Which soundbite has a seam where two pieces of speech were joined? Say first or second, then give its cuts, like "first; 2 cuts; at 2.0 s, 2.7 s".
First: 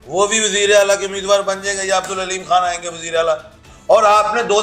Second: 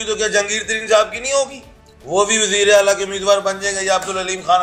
first; 1 cut; at 3.6 s